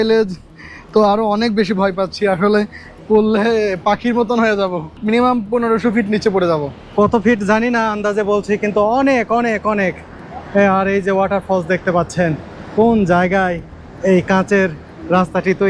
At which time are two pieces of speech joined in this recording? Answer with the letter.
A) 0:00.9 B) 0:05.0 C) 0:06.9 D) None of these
B